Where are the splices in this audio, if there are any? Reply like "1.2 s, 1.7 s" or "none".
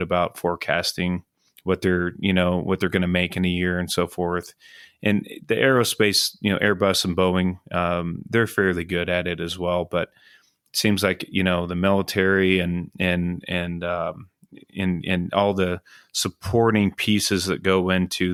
none